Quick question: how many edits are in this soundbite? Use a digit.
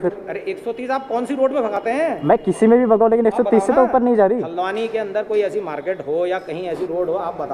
0